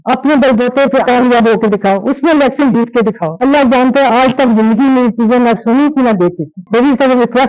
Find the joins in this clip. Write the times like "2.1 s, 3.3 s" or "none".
3.4 s, 6.6 s